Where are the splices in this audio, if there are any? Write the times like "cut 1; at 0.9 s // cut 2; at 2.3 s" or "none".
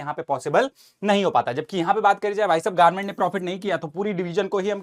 none